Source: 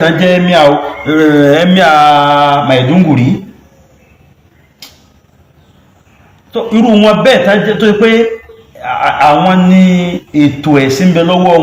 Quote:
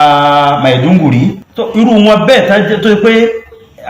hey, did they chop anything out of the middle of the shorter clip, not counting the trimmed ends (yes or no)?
yes